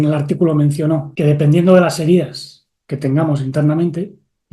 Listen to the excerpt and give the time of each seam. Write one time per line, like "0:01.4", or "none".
0:01.1